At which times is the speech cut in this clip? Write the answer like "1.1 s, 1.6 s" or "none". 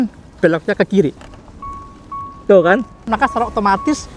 1.1 s, 3.1 s